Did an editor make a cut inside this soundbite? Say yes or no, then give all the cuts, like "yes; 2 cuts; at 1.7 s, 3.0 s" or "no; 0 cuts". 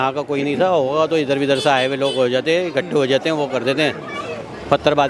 no; 0 cuts